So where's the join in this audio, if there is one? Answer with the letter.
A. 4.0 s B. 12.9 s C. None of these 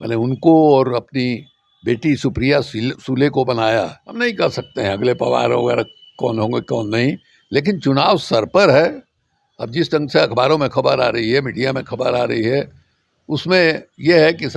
A